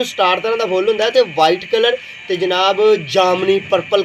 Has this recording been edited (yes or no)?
no